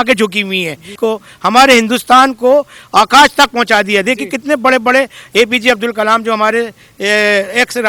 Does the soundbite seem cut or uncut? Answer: cut